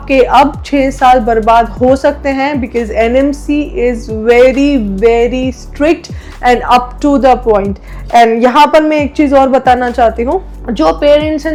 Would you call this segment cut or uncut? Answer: uncut